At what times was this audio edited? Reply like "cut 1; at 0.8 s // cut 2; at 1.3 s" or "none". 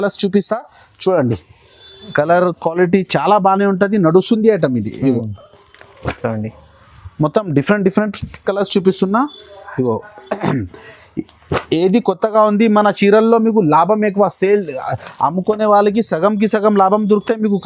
none